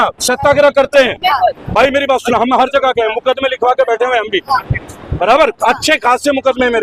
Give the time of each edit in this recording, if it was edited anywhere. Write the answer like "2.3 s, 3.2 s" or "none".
none